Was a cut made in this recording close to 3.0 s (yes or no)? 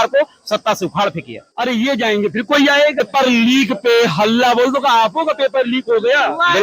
yes